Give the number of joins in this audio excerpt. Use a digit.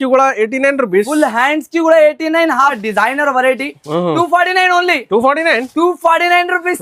1